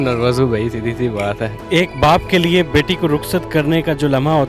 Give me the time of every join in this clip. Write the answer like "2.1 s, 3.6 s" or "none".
1.6 s